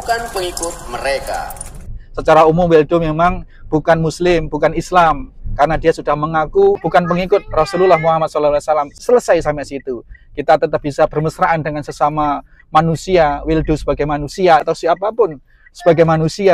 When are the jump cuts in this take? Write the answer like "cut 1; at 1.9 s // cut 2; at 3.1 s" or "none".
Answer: cut 1; at 1.9 s // cut 2; at 6.8 s // cut 3; at 8.9 s // cut 4; at 14.6 s